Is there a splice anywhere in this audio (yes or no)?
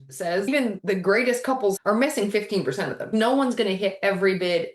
yes